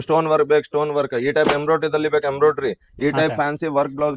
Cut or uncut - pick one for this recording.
uncut